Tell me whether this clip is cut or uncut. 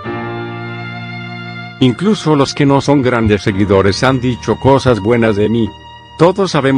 cut